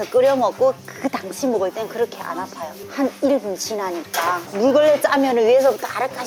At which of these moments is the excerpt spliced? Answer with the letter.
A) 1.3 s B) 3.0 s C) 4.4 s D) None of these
C